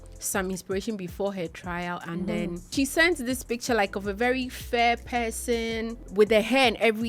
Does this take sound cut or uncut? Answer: cut